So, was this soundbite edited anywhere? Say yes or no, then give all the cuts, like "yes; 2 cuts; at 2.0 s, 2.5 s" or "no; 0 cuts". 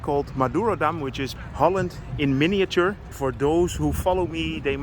yes; 2 cuts; at 1.3 s, 3.1 s